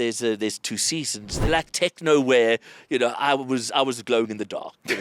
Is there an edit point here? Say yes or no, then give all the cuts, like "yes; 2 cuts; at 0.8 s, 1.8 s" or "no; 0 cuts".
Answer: yes; 1 cut; at 1.4 s